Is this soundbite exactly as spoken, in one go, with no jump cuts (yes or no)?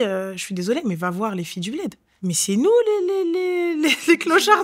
no